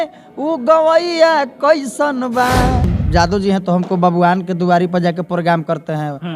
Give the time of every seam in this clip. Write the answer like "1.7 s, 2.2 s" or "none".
3.0 s